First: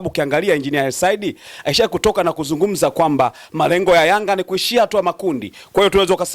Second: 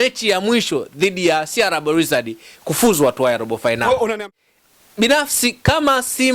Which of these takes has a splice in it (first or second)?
second